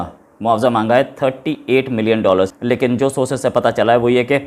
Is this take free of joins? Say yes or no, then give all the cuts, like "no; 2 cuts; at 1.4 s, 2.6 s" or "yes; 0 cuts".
no; 1 cut; at 2.5 s